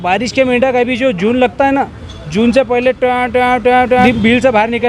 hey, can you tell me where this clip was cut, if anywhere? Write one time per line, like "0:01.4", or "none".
none